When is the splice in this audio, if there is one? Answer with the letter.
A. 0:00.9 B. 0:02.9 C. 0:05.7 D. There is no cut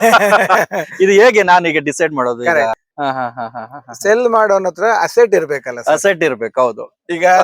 B